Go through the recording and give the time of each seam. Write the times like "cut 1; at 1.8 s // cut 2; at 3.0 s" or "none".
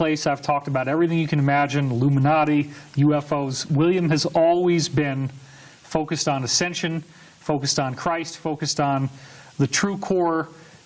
cut 1; at 9.5 s